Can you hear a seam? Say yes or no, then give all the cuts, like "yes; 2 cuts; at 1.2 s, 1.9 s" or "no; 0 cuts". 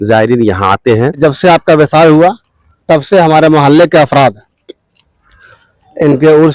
yes; 1 cut; at 1.2 s